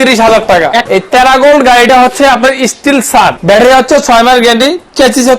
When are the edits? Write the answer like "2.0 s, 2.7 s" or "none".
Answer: 0.9 s, 3.4 s